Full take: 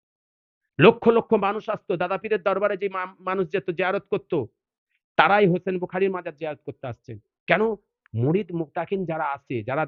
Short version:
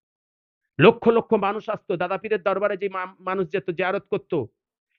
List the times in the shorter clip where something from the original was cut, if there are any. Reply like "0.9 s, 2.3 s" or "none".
none